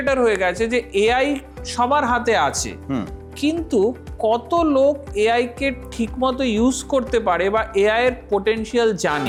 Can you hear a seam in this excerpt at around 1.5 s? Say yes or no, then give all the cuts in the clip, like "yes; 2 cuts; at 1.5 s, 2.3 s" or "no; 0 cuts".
no; 0 cuts